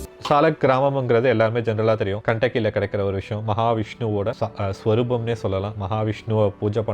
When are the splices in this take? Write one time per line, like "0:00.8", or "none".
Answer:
0:02.2
0:04.4